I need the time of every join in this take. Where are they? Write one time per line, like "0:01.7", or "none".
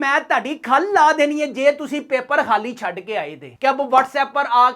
0:03.5